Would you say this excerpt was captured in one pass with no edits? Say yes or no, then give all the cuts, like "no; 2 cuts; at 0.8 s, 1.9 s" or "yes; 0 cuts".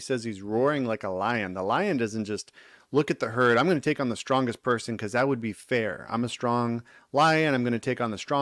yes; 0 cuts